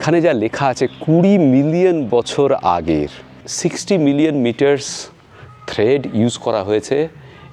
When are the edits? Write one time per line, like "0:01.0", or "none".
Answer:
0:03.5